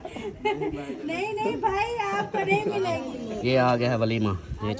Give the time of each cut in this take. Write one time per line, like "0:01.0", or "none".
0:03.1